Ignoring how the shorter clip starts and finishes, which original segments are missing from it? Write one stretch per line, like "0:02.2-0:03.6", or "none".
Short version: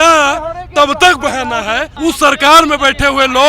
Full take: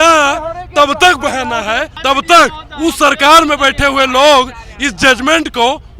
0:01.9-0:02.7